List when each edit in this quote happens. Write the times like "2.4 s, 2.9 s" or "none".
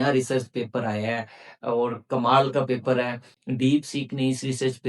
3.3 s